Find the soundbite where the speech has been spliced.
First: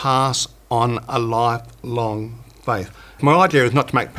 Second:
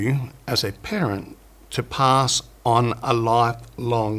first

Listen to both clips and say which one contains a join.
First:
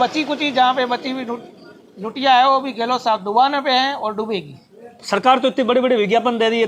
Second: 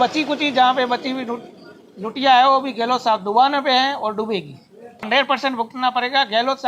second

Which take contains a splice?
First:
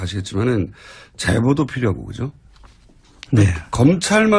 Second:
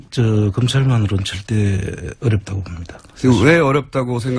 first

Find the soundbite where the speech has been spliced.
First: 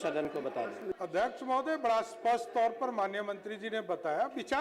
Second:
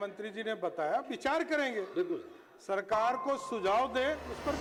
first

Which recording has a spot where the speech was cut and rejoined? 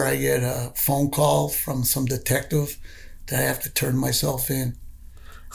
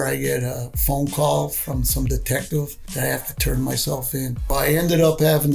second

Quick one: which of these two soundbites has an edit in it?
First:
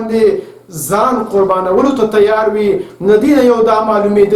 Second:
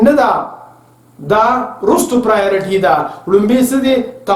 first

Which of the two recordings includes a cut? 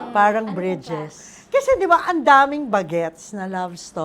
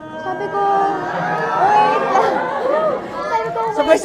first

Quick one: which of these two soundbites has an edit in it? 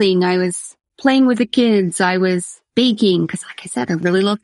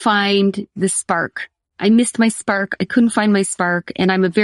first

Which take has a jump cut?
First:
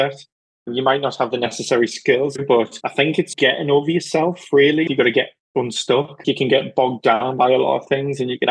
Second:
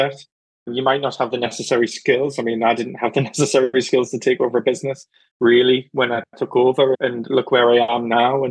first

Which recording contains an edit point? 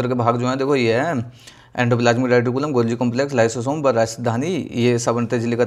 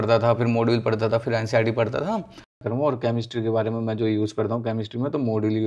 second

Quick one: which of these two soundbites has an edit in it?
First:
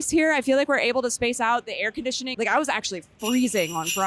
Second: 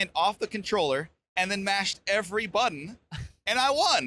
first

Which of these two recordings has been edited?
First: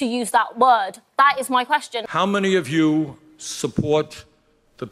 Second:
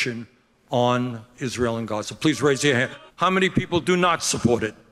first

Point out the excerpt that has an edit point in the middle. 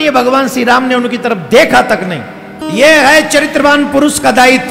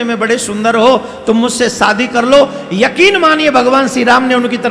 first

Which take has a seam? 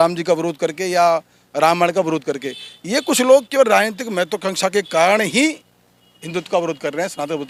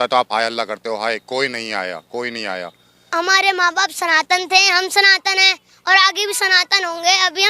second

